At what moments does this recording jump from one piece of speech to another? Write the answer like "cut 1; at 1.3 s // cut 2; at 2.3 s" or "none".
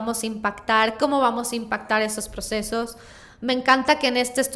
none